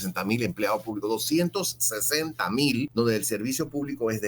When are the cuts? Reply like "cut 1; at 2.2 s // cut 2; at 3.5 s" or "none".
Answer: cut 1; at 2.9 s